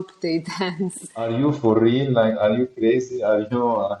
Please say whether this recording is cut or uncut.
cut